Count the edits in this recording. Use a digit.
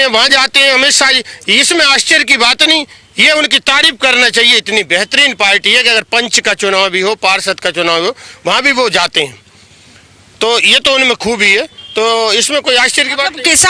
0